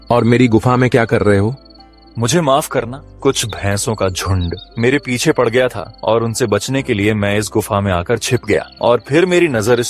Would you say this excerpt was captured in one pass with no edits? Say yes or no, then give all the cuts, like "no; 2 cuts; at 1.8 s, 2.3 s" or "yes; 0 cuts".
no; 4 cuts; at 3.0 s, 4.6 s, 5.9 s, 8.7 s